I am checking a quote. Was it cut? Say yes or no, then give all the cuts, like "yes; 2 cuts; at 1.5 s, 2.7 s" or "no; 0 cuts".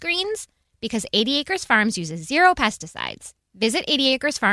no; 0 cuts